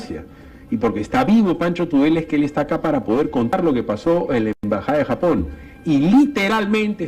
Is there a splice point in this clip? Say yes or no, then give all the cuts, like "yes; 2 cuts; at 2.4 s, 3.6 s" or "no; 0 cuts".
no; 0 cuts